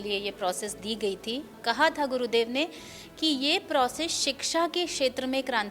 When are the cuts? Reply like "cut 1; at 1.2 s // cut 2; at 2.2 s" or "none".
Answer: cut 1; at 1.6 s